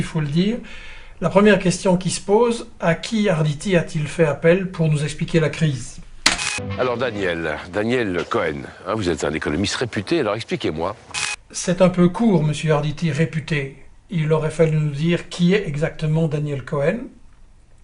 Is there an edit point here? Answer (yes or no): no